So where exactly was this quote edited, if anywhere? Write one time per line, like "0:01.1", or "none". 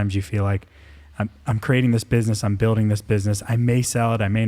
none